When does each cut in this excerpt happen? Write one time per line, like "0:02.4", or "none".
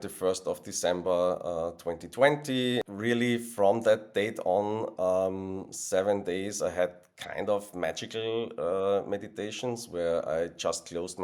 0:02.8